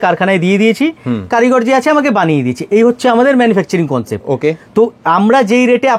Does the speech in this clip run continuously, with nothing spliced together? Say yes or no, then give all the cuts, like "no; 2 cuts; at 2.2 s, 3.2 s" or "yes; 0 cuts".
yes; 0 cuts